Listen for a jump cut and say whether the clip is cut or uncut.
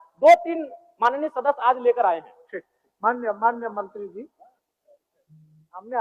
uncut